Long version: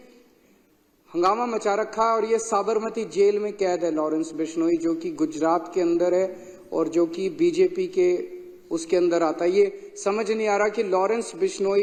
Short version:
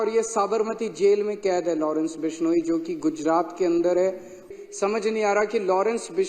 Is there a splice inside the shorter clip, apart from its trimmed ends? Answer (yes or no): yes